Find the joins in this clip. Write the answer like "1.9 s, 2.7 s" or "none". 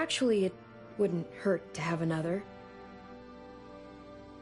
2.4 s